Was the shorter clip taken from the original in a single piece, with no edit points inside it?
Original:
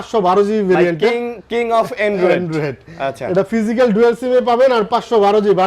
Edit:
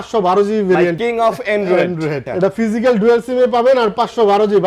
no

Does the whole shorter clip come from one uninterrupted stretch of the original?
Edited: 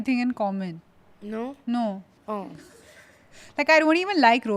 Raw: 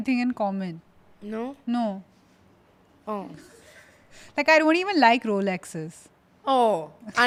no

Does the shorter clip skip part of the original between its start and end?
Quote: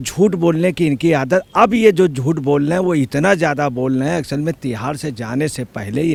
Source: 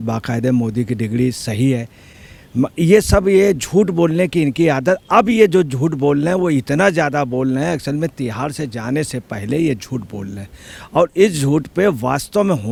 no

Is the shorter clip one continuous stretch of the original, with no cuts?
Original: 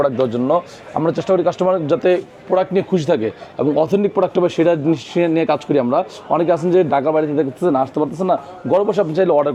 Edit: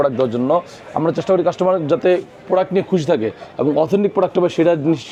yes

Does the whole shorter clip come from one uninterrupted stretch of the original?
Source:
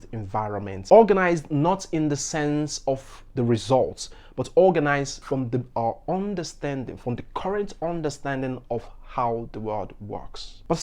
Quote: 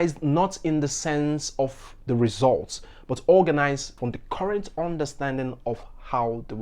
no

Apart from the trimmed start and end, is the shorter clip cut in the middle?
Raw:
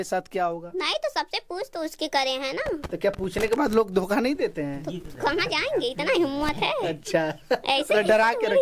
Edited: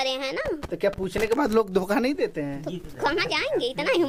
no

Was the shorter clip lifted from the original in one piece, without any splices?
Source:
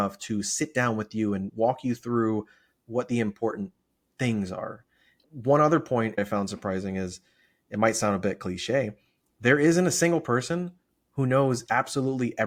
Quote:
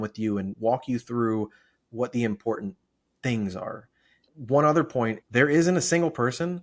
no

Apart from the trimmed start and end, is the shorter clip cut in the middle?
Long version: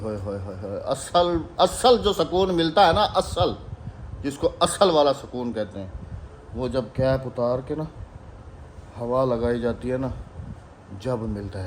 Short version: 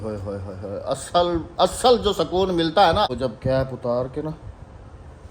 yes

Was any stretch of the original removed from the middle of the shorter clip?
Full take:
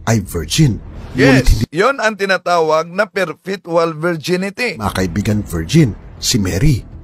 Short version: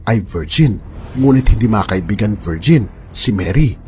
yes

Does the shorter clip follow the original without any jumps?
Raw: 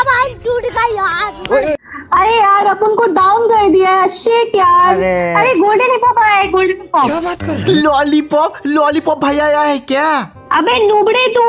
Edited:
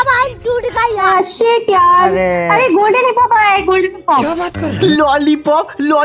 no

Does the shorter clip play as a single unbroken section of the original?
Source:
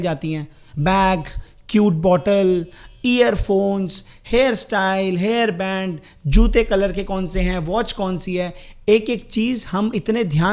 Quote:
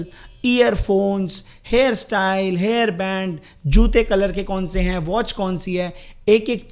yes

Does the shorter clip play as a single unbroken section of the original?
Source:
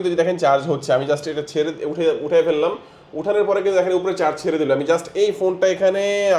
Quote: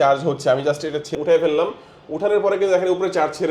no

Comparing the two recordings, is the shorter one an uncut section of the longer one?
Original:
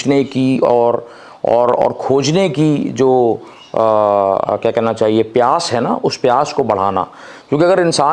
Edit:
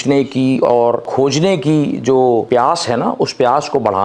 no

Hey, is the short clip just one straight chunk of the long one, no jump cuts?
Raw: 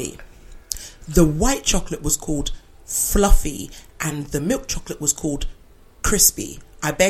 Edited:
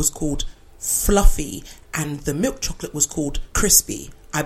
no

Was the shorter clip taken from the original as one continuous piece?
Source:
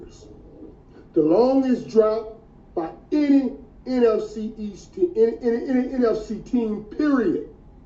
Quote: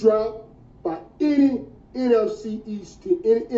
yes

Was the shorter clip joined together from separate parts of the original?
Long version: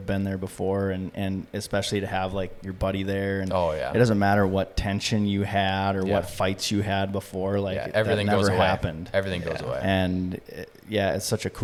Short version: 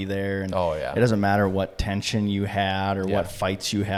no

